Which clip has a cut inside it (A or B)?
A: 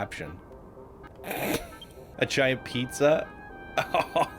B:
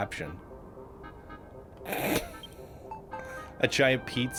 A